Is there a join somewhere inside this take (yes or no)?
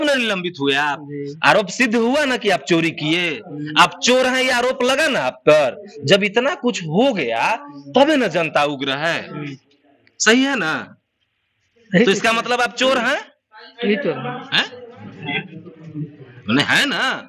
no